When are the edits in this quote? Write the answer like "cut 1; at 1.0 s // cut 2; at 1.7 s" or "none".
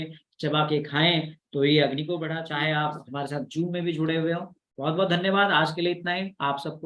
cut 1; at 2.3 s

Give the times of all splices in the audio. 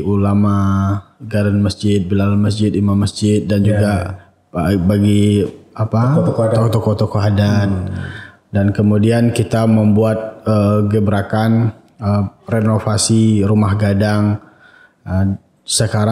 none

